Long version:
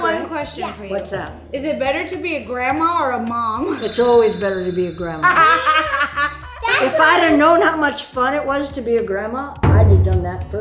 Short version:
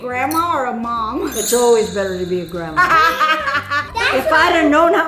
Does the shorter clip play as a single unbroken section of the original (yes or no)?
no